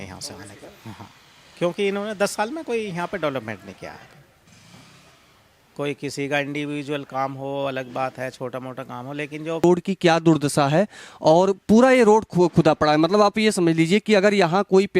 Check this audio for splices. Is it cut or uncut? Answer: cut